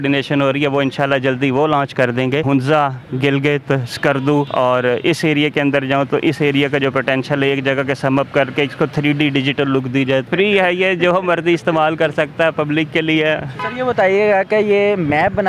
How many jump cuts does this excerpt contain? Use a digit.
4